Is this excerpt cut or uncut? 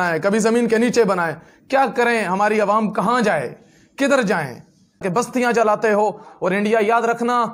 cut